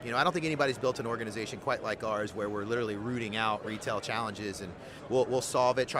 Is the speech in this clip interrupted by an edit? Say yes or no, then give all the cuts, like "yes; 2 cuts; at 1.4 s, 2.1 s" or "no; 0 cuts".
yes; 1 cut; at 4.9 s